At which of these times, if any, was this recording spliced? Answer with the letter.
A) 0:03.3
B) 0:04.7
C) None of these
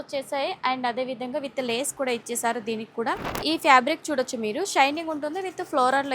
A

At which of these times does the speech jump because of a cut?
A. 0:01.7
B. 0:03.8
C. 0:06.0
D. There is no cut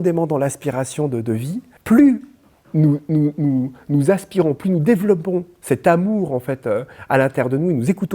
A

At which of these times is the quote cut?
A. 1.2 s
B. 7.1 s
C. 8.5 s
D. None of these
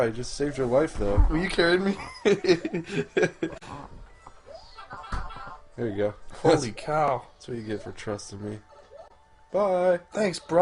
C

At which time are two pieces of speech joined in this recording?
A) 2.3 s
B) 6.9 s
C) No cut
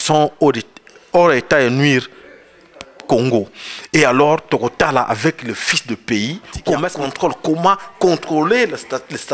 B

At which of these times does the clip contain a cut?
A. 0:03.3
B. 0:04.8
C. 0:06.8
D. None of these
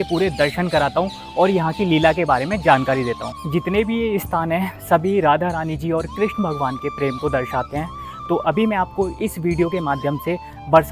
A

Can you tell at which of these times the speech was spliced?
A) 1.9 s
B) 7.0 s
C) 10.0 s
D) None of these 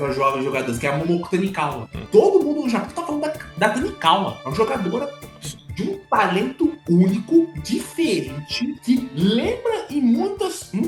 A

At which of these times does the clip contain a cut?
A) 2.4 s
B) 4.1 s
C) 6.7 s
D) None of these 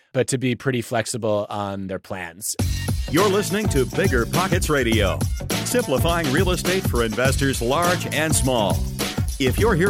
A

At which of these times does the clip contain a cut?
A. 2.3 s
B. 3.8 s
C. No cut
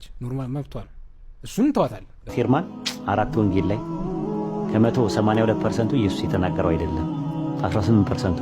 A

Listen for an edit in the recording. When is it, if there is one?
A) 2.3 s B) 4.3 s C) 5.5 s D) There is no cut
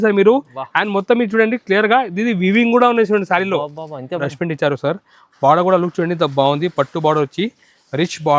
B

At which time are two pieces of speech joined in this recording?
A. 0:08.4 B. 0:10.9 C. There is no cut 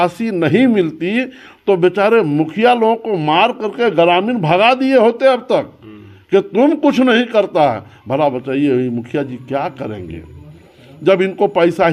C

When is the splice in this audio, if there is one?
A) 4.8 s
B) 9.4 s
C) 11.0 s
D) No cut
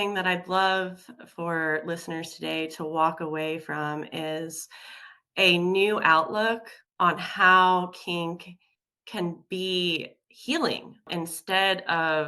D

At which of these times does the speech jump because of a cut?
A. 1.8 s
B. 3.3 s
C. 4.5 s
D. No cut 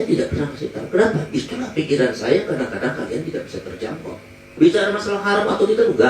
C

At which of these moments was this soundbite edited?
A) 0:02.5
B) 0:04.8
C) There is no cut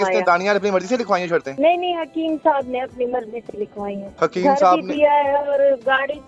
C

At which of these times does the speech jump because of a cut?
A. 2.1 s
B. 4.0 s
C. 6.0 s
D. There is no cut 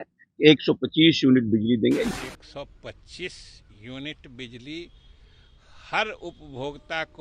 A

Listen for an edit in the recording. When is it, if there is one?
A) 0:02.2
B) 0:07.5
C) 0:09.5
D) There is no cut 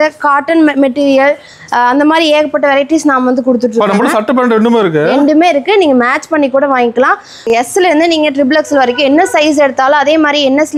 B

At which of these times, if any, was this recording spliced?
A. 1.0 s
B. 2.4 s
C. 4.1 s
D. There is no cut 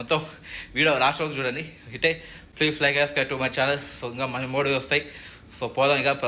B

